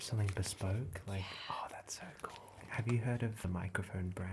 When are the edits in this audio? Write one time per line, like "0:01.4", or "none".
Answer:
0:02.6
0:03.4